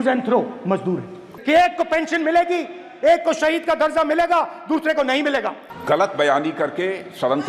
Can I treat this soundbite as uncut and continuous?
yes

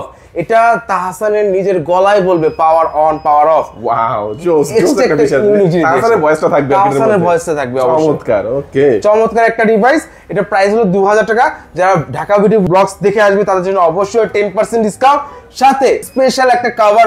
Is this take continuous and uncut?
yes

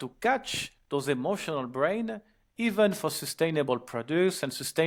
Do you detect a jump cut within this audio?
no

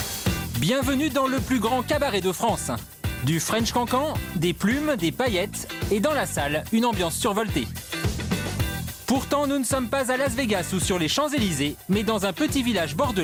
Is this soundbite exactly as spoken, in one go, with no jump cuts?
yes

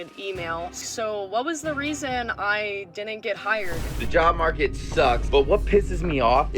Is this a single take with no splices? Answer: no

